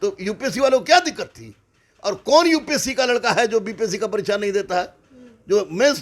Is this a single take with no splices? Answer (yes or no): yes